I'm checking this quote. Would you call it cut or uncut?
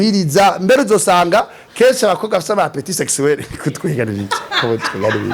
uncut